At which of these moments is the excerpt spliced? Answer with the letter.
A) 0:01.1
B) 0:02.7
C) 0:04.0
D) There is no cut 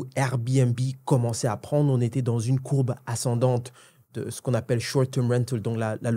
C